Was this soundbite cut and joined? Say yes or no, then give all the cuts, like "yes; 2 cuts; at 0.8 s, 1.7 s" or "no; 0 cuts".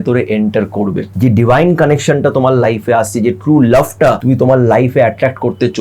yes; 2 cuts; at 1.1 s, 4.2 s